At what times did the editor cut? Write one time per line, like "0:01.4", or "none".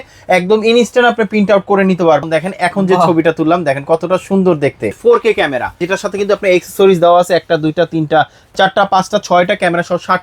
0:02.3
0:05.0
0:05.8